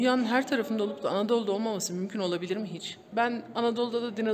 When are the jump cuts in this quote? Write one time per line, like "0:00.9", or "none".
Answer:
0:03.0